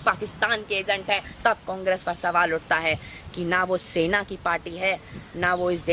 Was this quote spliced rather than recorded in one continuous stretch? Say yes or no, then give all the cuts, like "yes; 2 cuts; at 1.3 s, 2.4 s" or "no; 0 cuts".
yes; 1 cut; at 1.3 s